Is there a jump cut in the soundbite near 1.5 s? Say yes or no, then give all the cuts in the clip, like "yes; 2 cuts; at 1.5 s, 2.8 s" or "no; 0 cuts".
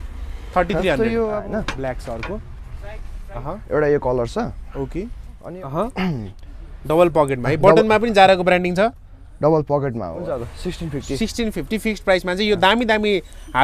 yes; 3 cuts; at 1.5 s, 5.4 s, 10.1 s